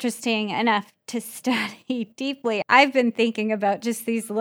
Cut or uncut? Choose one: cut